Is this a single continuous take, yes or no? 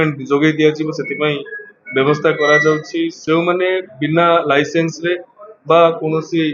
no